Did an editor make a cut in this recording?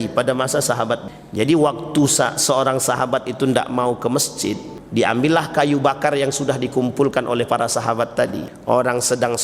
yes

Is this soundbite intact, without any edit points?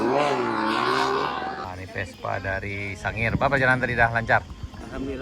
no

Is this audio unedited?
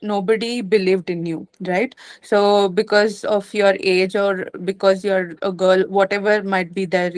yes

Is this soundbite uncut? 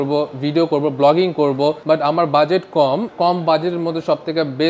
no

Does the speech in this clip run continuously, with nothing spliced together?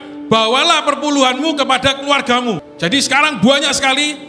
no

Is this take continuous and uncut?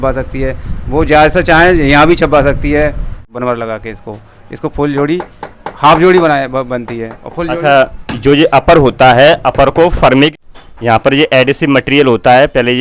no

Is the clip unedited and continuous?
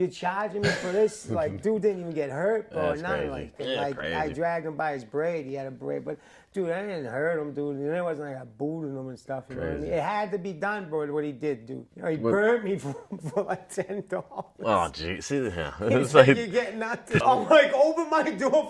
no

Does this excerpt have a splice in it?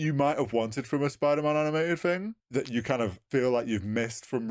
yes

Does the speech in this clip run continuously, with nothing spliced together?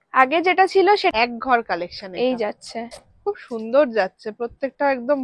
no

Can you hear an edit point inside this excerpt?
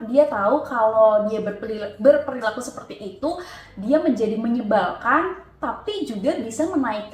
no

